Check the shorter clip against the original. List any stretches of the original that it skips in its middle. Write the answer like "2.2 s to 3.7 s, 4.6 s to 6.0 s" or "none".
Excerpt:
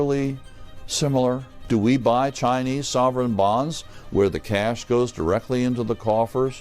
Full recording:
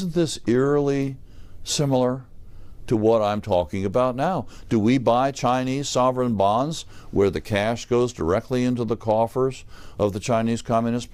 2.3 s to 4.5 s